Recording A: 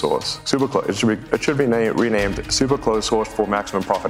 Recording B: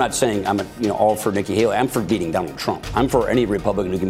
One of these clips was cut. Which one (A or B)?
A